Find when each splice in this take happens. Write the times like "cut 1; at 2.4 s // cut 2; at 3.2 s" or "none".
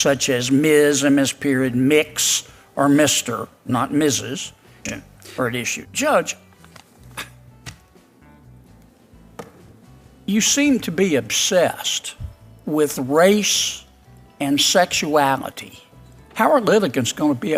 cut 1; at 4.8 s